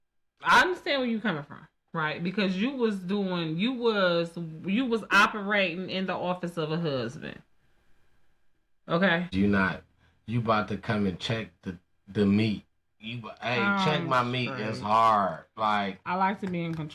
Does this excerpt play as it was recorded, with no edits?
no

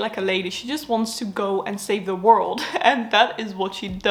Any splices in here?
no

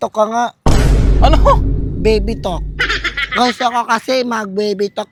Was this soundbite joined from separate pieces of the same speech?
no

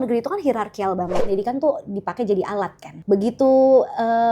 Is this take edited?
yes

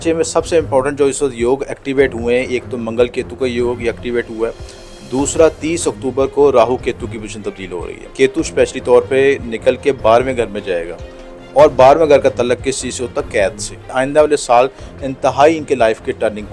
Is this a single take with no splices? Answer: no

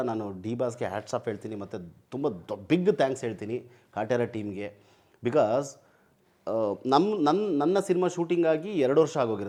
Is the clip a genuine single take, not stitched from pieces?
yes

